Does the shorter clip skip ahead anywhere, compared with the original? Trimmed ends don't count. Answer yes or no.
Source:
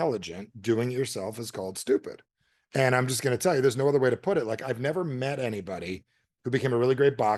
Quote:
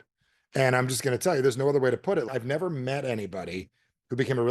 yes